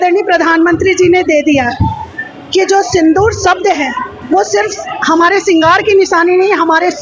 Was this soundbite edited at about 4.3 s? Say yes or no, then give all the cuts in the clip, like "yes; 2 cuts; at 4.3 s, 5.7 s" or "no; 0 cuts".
no; 0 cuts